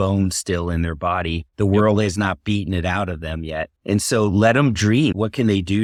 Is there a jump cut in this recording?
no; 0 cuts

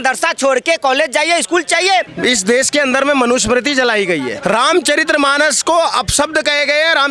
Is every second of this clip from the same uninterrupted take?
no; 2 cuts; at 2.1 s, 4.3 s

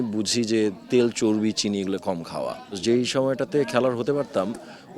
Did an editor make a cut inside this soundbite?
yes; 1 cut; at 2.8 s

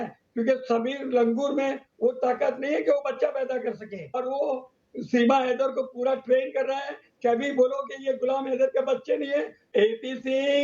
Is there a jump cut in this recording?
yes; 2 cuts; at 4.2 s, 9.6 s

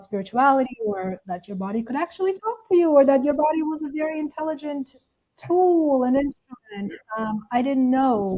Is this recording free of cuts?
yes; 0 cuts

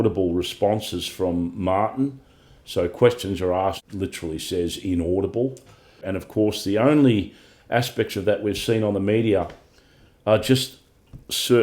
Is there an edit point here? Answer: yes; 2 cuts; at 3.8 s, 6.0 s

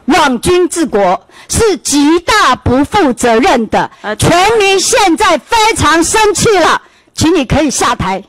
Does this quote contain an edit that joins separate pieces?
no; 0 cuts

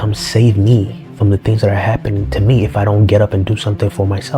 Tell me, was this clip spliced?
yes; 1 cut; at 1.0 s

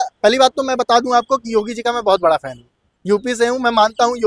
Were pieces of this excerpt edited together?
no; 0 cuts

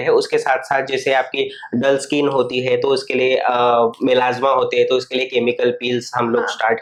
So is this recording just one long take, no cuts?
yes; 0 cuts

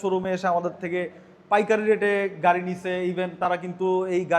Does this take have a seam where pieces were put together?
no; 0 cuts

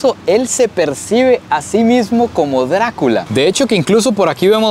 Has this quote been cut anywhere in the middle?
yes; 1 cut; at 3.2 s

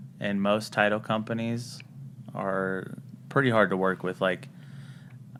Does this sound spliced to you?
no; 0 cuts

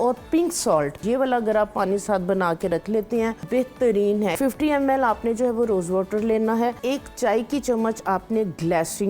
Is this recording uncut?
no; 4 cuts; at 1.0 s, 3.4 s, 4.3 s, 6.8 s

